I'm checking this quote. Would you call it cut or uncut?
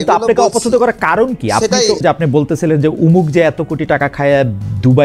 cut